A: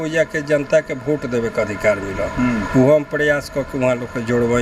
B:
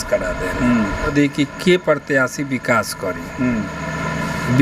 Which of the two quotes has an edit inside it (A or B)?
B